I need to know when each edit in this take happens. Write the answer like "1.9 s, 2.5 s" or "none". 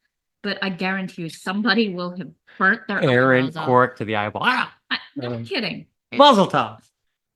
none